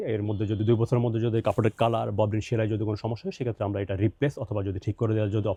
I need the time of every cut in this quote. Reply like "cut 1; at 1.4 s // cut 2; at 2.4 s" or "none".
none